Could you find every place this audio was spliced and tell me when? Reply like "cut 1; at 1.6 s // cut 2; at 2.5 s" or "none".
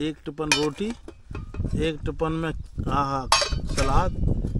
none